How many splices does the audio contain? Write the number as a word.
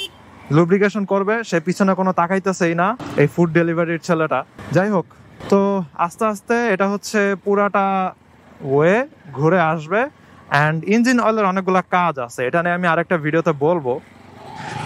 zero